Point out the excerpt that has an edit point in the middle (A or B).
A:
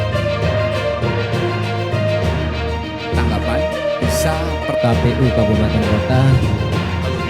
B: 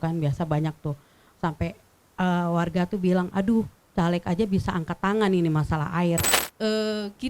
B